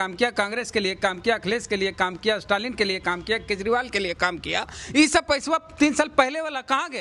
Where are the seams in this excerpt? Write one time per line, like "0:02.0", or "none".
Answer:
none